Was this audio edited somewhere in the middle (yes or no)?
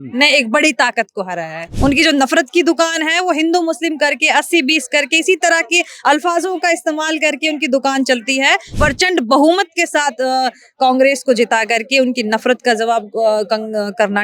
yes